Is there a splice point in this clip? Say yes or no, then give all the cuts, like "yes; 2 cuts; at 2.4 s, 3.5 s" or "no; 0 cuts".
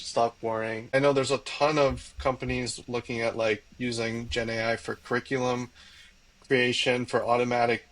yes; 1 cut; at 0.9 s